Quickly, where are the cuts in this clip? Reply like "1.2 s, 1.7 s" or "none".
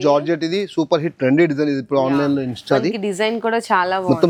none